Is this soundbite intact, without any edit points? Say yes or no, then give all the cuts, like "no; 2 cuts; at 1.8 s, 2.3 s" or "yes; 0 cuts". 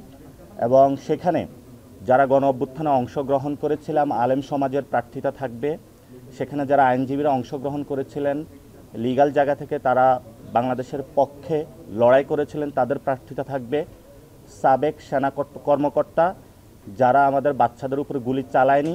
yes; 0 cuts